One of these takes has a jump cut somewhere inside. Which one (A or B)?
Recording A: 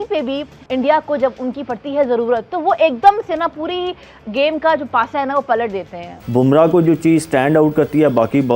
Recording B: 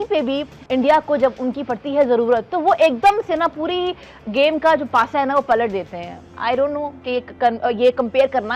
A